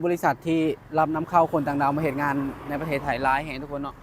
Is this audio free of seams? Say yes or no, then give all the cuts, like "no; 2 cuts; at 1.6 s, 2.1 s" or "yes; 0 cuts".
yes; 0 cuts